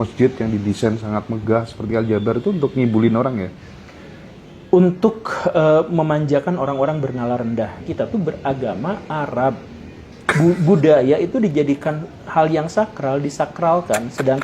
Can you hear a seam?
yes; 1 cut; at 7.9 s

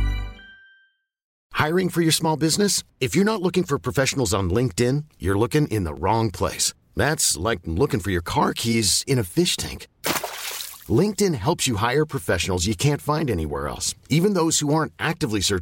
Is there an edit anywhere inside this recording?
yes; 1 cut; at 1.3 s

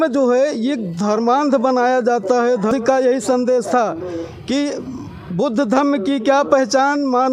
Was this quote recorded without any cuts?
no; 1 cut; at 2.7 s

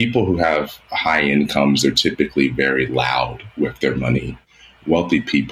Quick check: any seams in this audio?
yes; 1 cut; at 4.4 s

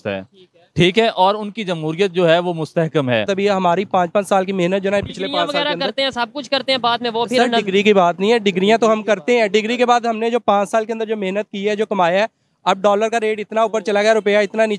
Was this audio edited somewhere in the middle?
yes; 1 cut; at 3.3 s

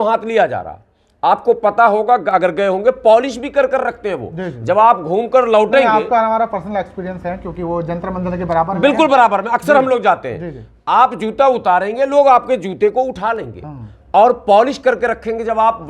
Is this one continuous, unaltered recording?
yes; 0 cuts

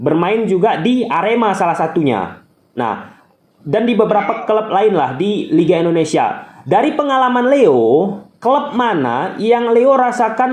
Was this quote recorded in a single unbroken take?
yes; 0 cuts

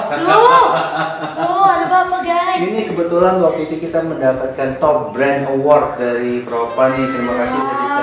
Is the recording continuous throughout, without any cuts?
yes; 0 cuts

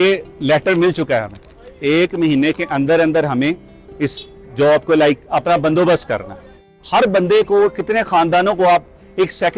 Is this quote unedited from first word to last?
no; 1 cut; at 6.7 s

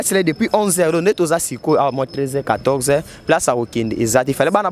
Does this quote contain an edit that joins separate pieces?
no; 0 cuts

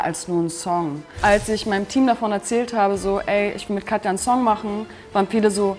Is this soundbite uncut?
no; 1 cut; at 1.0 s

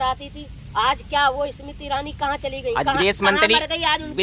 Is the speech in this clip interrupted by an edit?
no; 0 cuts

